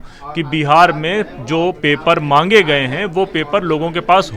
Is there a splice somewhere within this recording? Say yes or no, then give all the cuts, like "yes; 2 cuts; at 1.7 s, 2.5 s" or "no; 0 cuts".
no; 0 cuts